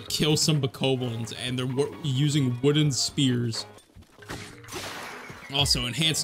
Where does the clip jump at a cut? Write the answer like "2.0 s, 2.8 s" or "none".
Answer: 3.7 s